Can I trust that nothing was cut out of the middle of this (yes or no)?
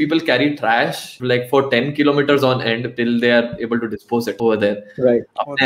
no